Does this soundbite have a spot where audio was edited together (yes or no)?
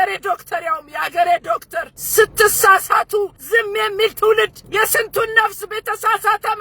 yes